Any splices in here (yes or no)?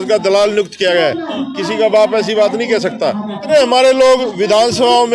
yes